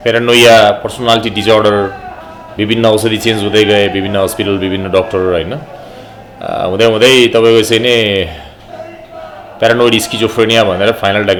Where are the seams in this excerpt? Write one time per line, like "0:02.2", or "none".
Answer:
none